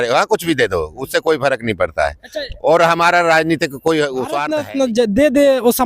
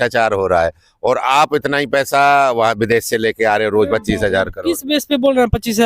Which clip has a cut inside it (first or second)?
first